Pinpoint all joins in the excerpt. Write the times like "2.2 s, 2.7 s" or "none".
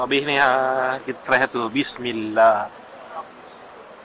1.0 s, 2.8 s